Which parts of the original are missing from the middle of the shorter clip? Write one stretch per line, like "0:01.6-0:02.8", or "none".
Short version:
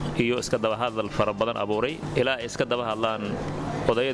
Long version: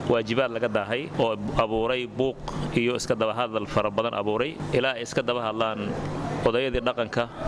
none